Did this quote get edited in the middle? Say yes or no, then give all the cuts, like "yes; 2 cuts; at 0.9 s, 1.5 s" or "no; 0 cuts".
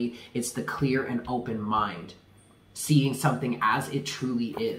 no; 0 cuts